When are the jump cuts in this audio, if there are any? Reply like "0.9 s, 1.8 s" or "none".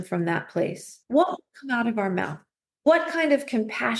1.0 s, 2.5 s